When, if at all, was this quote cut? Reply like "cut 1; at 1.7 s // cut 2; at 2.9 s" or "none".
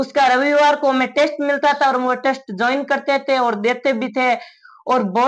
none